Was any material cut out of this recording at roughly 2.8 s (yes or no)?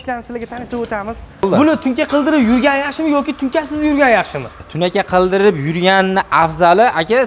no